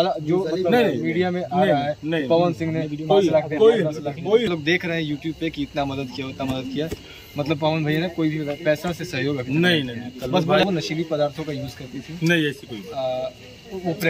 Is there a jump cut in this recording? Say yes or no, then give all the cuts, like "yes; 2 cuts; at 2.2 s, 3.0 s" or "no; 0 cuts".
yes; 2 cuts; at 4.5 s, 10.6 s